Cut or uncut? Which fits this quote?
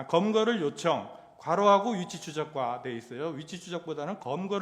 uncut